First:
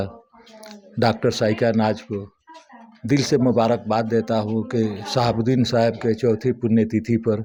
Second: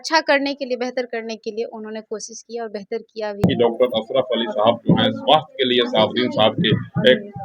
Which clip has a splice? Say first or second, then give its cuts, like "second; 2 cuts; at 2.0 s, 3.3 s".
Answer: second; 1 cut; at 3.4 s